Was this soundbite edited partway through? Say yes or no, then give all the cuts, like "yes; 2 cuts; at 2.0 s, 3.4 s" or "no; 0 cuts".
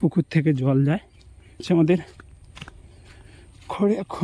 yes; 1 cut; at 1.6 s